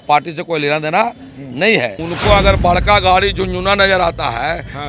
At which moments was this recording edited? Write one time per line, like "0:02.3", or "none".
0:02.0